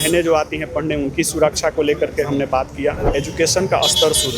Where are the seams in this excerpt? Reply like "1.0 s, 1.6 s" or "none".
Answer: 3.1 s